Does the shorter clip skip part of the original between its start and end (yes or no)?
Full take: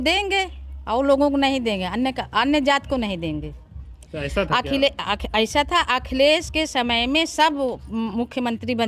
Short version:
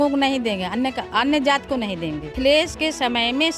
yes